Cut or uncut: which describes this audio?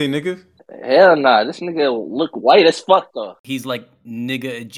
cut